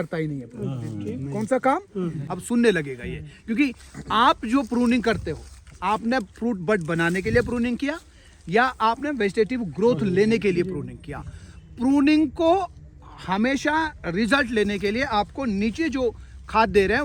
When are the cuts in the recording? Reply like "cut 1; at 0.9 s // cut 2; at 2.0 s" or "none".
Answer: cut 1; at 2.3 s